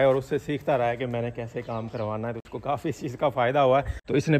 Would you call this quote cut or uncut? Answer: uncut